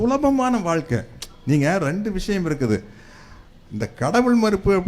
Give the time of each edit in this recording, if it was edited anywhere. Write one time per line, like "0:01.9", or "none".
none